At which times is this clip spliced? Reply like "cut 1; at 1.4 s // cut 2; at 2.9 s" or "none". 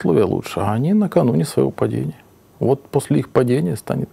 none